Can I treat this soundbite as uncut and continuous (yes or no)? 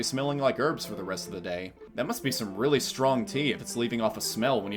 no